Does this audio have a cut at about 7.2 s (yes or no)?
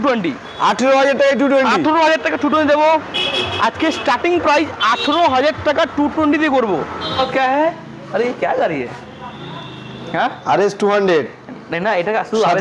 yes